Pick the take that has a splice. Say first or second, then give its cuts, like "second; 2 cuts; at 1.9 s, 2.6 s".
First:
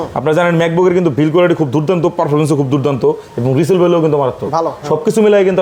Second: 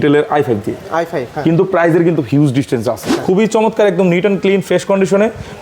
second; 1 cut; at 3.1 s